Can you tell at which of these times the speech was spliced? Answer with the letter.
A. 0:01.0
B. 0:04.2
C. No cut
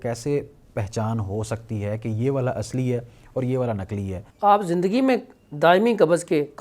B